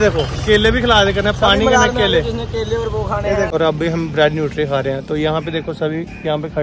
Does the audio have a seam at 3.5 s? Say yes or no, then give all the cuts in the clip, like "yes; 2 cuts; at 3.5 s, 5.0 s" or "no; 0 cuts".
yes; 1 cut; at 3.5 s